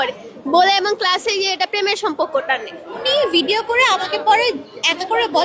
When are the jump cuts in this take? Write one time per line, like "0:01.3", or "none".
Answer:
0:03.0